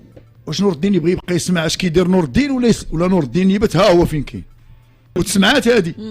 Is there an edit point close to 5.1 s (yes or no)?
yes